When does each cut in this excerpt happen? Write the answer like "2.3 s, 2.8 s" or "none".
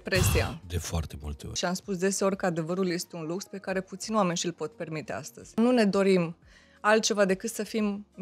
1.5 s, 5.6 s